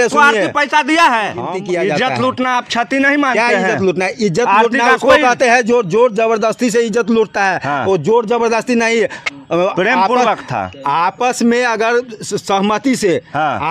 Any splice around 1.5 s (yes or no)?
yes